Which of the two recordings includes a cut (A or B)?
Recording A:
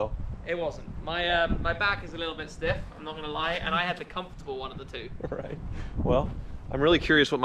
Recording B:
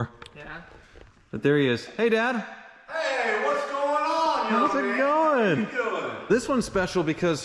B